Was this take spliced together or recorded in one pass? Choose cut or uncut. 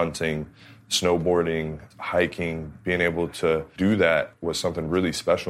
cut